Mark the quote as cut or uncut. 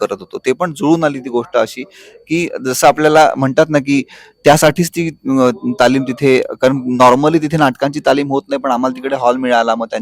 uncut